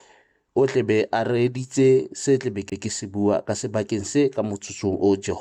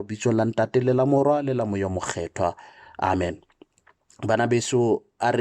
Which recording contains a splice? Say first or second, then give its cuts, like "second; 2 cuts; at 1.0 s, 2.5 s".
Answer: second; 1 cut; at 1.2 s